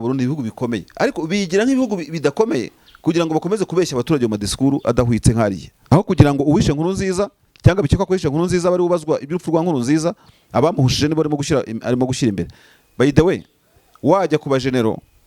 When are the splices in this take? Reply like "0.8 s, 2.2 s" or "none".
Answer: 5.7 s